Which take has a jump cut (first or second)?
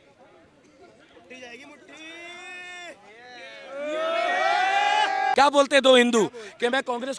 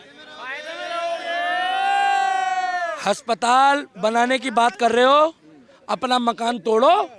first